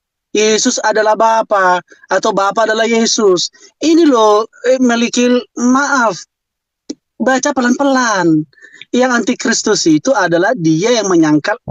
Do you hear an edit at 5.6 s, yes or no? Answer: no